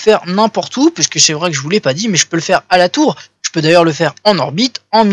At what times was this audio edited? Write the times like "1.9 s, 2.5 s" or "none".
3.0 s